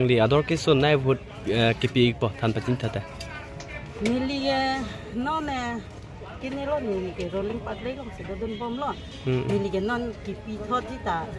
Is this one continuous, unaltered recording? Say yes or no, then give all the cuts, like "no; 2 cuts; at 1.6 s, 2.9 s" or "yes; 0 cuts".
yes; 0 cuts